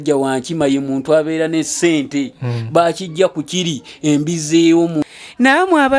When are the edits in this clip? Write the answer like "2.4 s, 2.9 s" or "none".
5.0 s